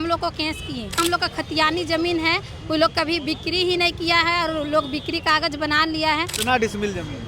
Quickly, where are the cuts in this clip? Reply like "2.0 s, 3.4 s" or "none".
0.9 s, 6.3 s